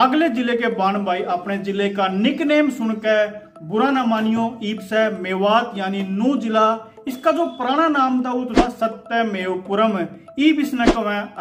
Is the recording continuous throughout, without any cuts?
yes; 0 cuts

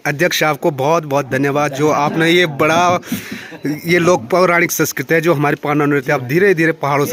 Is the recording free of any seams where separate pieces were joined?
yes; 0 cuts

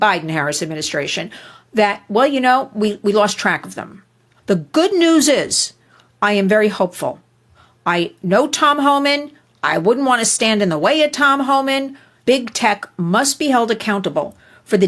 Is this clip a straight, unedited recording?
no; 2 cuts; at 4.3 s, 12.2 s

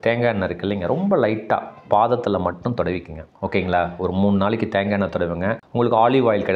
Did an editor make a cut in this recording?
no; 0 cuts

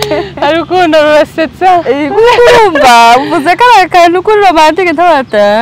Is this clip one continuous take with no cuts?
yes; 0 cuts

